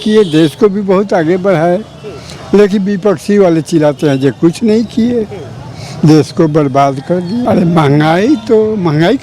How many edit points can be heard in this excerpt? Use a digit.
1